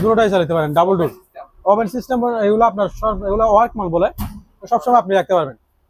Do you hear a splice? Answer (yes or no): no